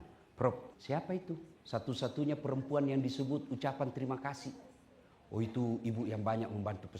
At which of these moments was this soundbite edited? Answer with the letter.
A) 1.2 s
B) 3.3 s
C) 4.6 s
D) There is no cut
A